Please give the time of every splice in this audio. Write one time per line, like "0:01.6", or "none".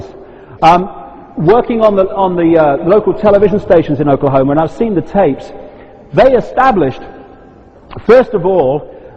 0:03.9